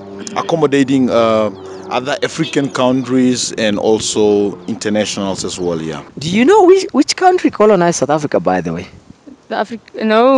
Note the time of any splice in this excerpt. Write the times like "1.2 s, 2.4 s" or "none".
6.1 s